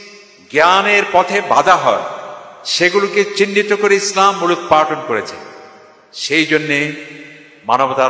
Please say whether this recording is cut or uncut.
uncut